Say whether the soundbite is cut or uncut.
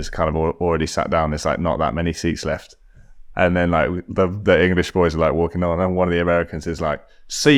uncut